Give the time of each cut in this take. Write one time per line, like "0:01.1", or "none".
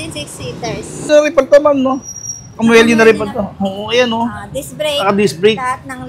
0:01.1